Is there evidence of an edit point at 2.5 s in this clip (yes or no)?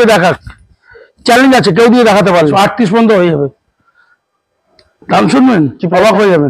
yes